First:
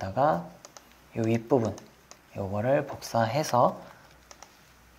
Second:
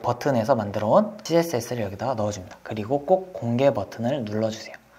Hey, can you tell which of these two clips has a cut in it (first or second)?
second